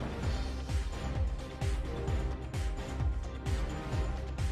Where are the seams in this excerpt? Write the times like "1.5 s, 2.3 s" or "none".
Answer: none